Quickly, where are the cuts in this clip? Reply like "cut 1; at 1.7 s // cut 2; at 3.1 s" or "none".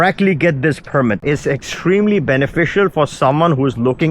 cut 1; at 1.2 s